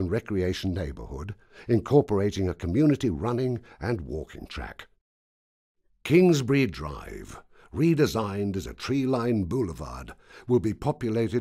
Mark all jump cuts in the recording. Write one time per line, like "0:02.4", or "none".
none